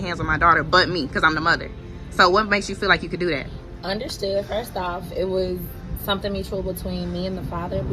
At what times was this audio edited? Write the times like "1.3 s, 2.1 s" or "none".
6.2 s

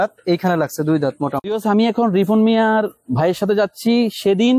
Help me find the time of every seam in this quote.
1.4 s

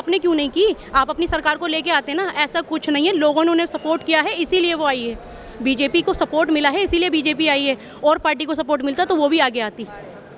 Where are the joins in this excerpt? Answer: none

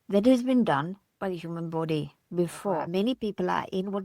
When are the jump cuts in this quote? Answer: 2.9 s

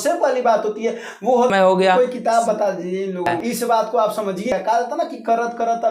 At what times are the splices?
1.5 s, 3.4 s, 4.5 s

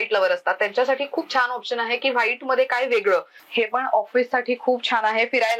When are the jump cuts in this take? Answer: 3.4 s

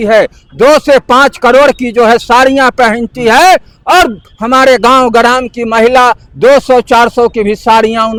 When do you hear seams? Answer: none

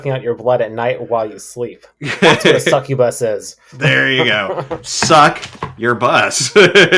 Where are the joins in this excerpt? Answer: none

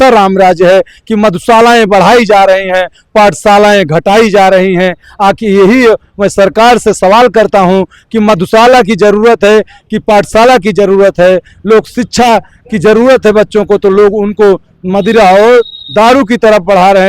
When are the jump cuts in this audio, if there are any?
none

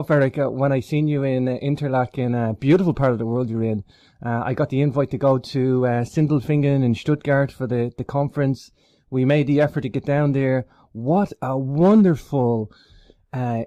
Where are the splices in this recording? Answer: 3.0 s

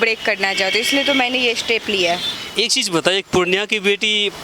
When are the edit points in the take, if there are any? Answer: 2.4 s

